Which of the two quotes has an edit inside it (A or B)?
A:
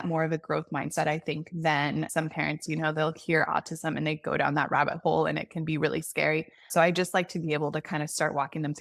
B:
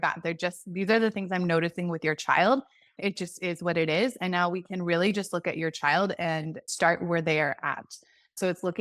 B